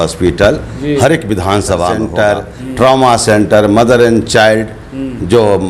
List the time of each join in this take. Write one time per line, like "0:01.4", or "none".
0:02.0